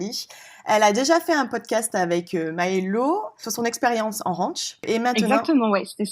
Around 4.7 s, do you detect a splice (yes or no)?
no